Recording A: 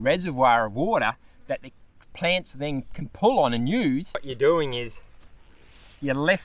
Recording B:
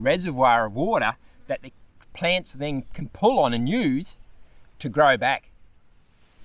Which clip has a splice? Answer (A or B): A